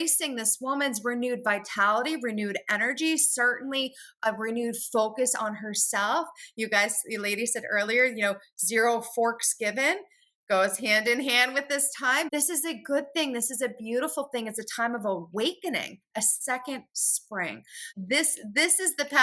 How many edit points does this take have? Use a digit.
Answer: 2